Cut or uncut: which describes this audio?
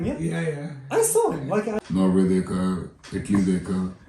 cut